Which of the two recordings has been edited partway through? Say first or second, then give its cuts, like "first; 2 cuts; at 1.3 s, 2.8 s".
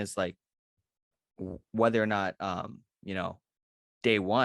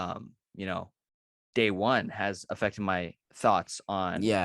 second; 1 cut; at 3.2 s